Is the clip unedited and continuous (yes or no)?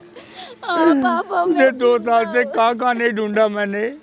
yes